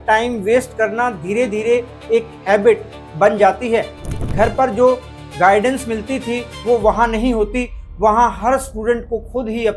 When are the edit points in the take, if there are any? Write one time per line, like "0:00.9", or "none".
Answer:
0:04.1